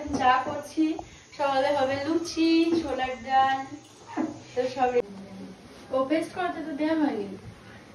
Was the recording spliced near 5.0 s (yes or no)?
yes